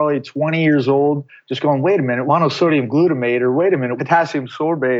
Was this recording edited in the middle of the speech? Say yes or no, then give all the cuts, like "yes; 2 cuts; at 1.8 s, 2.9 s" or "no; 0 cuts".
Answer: yes; 2 cuts; at 2.2 s, 3.9 s